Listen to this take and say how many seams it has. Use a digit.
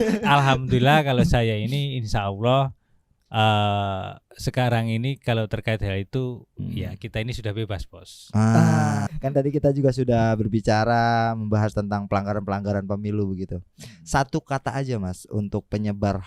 1